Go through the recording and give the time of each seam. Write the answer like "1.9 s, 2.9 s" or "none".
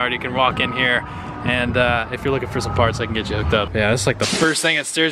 3.7 s